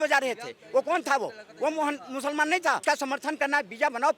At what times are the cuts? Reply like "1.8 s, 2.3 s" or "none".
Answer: 2.8 s